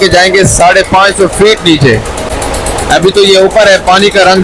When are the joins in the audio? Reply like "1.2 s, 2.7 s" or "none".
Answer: none